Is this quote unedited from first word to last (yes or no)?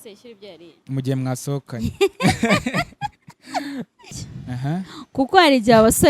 no